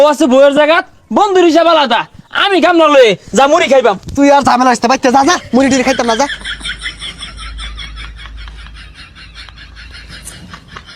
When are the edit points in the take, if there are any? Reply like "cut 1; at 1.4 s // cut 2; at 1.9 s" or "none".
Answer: cut 1; at 6.3 s